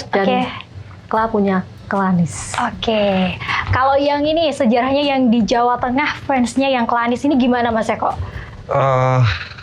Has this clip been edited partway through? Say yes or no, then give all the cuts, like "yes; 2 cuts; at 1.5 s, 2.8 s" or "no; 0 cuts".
no; 0 cuts